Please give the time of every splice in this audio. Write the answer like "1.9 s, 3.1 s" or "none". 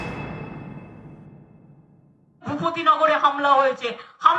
2.3 s